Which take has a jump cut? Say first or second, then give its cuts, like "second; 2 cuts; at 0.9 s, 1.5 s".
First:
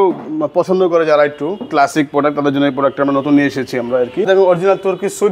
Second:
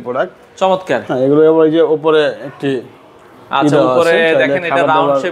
first; 1 cut; at 4.3 s